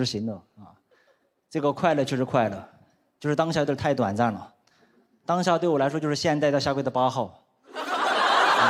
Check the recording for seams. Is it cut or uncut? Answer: uncut